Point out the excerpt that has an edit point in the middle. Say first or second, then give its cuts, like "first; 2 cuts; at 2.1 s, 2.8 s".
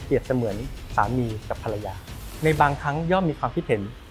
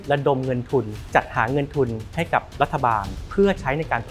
second; 2 cuts; at 1.0 s, 3.2 s